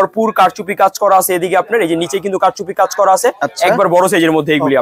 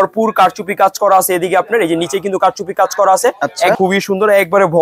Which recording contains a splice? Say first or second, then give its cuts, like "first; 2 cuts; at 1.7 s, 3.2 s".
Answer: second; 1 cut; at 3.8 s